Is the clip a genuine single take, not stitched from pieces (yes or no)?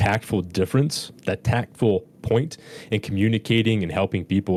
yes